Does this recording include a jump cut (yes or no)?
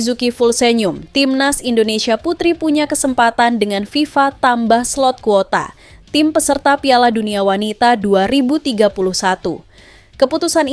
no